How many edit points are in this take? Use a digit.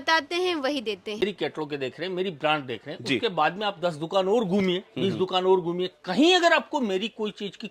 1